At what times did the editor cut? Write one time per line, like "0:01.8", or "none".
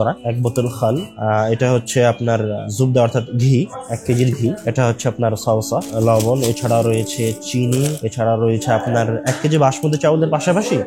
none